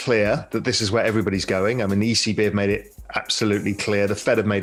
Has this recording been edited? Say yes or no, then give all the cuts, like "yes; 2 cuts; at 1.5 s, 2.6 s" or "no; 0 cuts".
no; 0 cuts